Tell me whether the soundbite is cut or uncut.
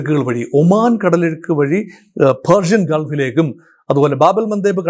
uncut